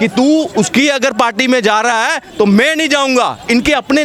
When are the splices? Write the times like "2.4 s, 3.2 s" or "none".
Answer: none